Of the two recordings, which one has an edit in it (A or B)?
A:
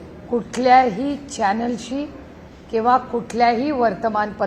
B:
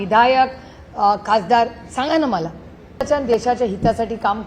B